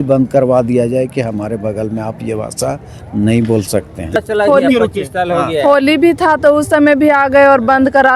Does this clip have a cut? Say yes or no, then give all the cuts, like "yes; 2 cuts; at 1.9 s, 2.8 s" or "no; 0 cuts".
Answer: yes; 1 cut; at 4.2 s